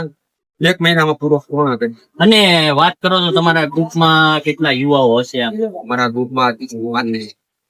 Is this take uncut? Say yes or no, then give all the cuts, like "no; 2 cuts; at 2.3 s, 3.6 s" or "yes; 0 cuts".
yes; 0 cuts